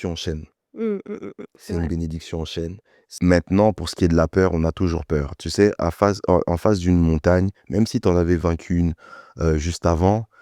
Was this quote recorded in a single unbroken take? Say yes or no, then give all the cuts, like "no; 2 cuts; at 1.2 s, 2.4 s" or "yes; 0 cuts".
no; 1 cut; at 3.0 s